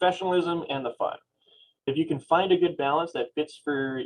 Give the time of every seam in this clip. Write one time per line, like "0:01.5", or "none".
0:01.9